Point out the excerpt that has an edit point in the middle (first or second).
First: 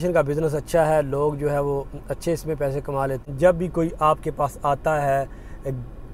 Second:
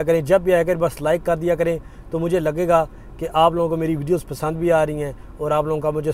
first